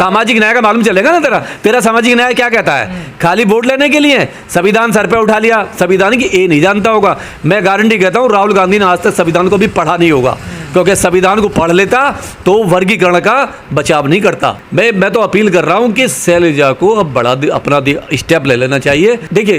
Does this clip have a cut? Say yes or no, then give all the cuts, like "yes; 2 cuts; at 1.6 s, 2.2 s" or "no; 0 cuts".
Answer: yes; 1 cut; at 14.6 s